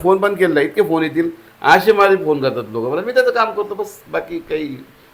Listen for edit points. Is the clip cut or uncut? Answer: uncut